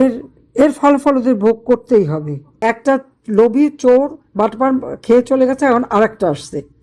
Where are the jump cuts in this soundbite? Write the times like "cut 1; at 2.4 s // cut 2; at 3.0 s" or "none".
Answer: cut 1; at 2.6 s